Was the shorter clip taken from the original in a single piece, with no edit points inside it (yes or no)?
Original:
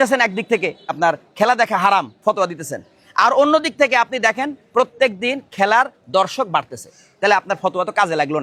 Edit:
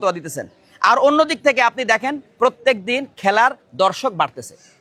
yes